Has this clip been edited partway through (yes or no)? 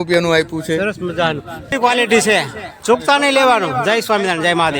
yes